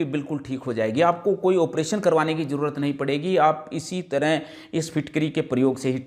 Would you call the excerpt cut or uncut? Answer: uncut